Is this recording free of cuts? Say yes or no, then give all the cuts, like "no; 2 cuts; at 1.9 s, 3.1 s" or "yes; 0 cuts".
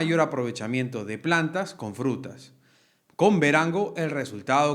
yes; 0 cuts